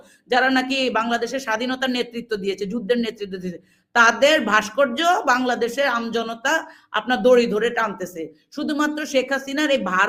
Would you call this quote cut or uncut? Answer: uncut